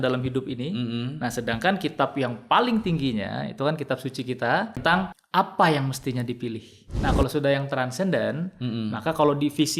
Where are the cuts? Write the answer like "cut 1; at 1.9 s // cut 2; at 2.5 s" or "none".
cut 1; at 4.8 s // cut 2; at 6.9 s